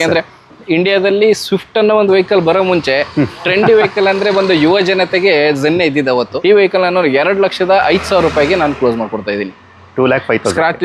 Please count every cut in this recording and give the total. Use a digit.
1